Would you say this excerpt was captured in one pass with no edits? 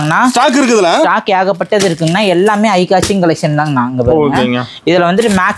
yes; 0 cuts

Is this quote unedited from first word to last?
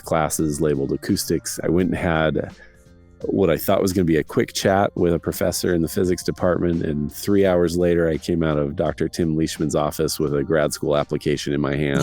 no; 1 cut; at 1.6 s

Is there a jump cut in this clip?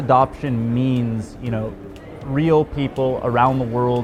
no; 0 cuts

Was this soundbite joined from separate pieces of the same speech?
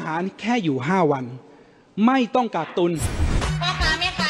yes; 1 cut; at 3.3 s

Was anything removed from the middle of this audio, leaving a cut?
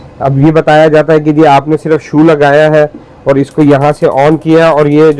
no; 0 cuts

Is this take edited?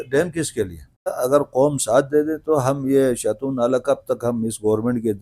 yes; 1 cut; at 1.1 s

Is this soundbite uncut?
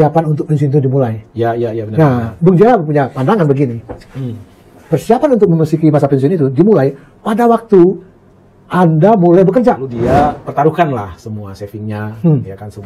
no; 1 cut; at 9.9 s

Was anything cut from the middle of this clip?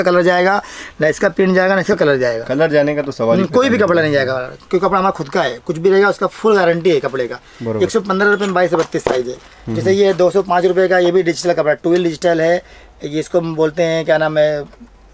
no; 0 cuts

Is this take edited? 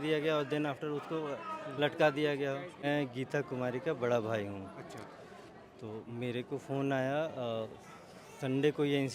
yes; 1 cut; at 2.8 s

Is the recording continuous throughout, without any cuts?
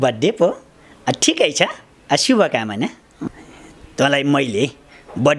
no; 1 cut; at 3.3 s

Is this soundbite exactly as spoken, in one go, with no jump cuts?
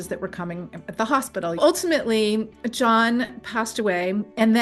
no; 1 cut; at 1.6 s

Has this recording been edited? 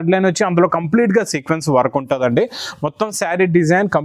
no; 0 cuts

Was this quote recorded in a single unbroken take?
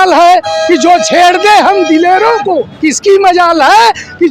no; 1 cut; at 2.7 s

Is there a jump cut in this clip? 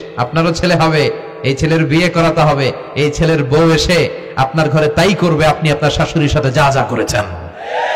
no; 0 cuts

